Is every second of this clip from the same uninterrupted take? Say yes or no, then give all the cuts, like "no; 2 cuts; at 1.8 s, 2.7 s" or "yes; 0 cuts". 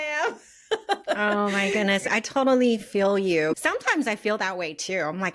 no; 2 cuts; at 2.1 s, 3.6 s